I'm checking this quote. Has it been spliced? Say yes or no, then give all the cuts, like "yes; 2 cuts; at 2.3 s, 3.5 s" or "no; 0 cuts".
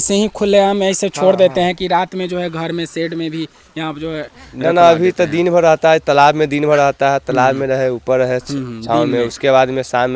no; 0 cuts